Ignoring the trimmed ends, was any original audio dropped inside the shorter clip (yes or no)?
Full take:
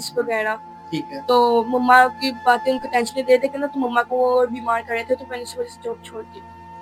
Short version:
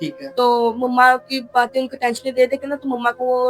no